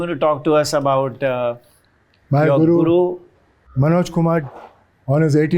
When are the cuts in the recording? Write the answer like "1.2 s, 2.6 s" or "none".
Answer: none